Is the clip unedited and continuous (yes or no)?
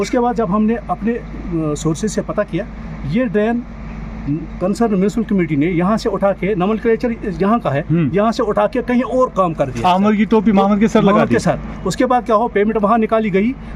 yes